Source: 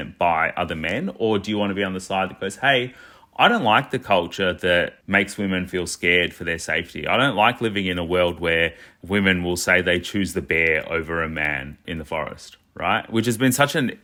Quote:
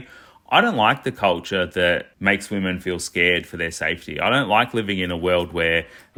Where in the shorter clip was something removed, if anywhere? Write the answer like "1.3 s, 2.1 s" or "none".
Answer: none